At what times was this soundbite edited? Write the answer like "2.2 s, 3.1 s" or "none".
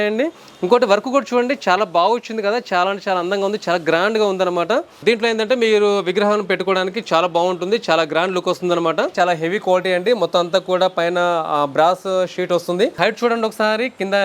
5.0 s, 9.1 s, 12.9 s